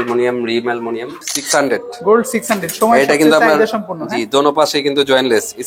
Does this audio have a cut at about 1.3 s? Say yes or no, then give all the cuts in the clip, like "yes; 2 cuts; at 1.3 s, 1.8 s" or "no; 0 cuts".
yes; 1 cut; at 1.3 s